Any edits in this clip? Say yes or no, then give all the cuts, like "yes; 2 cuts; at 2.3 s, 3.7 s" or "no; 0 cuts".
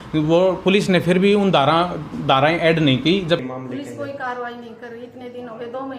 yes; 1 cut; at 3.4 s